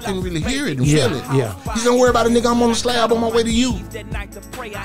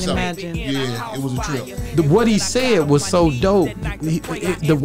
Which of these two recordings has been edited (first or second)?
first